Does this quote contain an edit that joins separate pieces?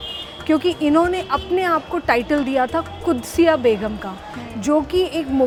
no; 0 cuts

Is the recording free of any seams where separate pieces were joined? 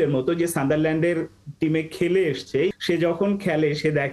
no; 1 cut; at 2.7 s

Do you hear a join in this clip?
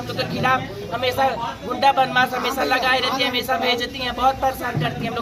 no; 0 cuts

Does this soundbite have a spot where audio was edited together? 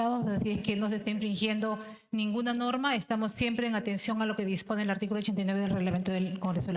no; 0 cuts

